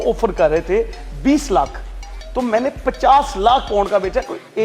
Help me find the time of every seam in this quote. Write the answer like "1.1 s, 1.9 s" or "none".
none